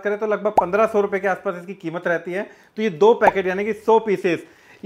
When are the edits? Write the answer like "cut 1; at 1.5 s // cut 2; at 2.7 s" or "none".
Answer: none